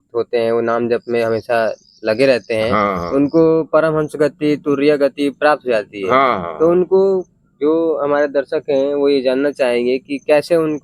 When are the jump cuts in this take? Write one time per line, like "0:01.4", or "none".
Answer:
none